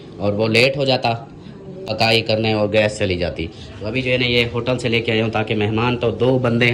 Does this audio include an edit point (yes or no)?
no